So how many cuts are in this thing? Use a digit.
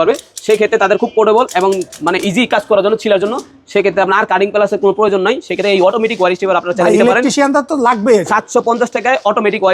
0